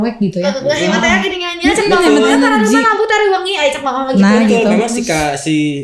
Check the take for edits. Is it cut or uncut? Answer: uncut